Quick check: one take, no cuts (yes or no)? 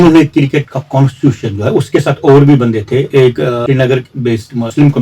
yes